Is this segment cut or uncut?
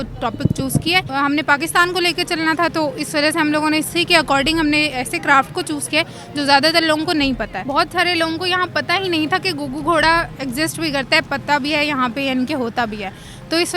cut